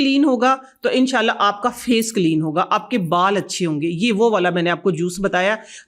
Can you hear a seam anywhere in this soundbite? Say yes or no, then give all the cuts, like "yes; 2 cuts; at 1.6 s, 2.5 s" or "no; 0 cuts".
no; 0 cuts